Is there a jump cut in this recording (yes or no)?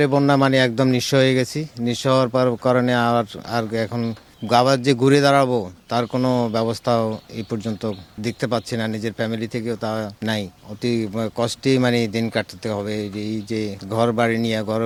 no